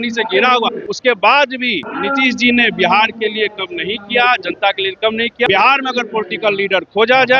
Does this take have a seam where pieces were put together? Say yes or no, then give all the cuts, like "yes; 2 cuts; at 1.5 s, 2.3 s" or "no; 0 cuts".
yes; 3 cuts; at 0.9 s, 1.8 s, 5.5 s